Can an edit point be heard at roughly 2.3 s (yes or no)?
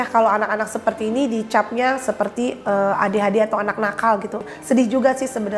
no